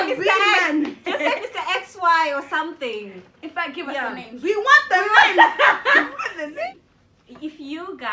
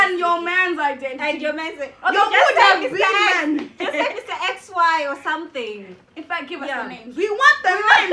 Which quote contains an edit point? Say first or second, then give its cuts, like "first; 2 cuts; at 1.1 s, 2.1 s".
first; 1 cut; at 6.7 s